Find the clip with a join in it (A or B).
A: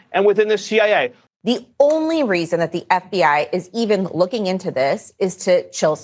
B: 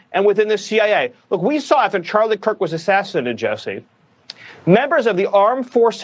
A